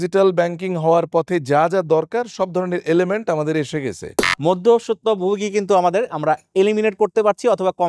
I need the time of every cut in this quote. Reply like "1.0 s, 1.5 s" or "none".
4.1 s